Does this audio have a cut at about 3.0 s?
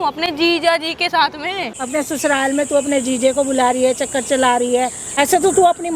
no; 2 cuts; at 1.7 s, 5.0 s

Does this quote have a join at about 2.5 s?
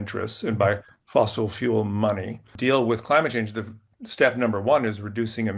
yes; 1 cut; at 2.5 s

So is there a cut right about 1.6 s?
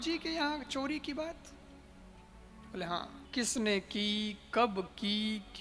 no; 0 cuts

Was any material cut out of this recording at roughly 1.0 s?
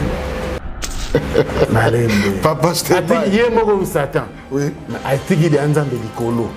yes; 1 cut; at 1.0 s

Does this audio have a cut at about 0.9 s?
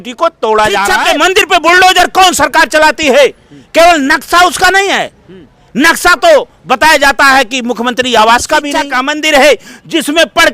yes; 2 cuts; at 0.9 s, 8.8 s

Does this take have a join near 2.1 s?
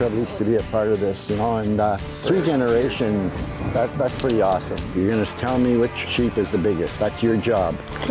no; 3 cuts; at 4.8 s, 6.0 s, 6.9 s

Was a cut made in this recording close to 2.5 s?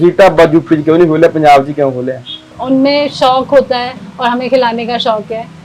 yes; 1 cut; at 2.5 s

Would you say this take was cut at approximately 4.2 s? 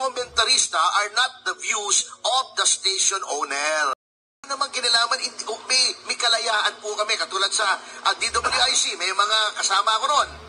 yes; 1 cut; at 4.2 s

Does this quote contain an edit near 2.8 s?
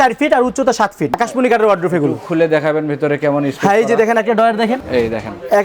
no; 2 cuts; at 1.1 s, 4.8 s

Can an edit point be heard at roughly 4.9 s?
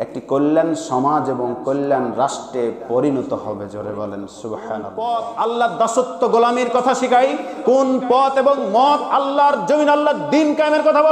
yes; 1 cut; at 4.9 s

